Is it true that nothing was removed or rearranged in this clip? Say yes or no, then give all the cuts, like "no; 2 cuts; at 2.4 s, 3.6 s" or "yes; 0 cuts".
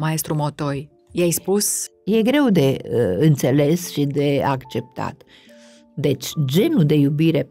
no; 2 cuts; at 1.0 s, 1.8 s